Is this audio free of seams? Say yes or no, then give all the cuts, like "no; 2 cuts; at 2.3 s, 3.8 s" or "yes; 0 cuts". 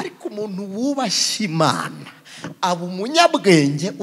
yes; 0 cuts